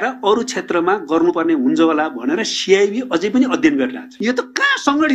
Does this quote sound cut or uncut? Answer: cut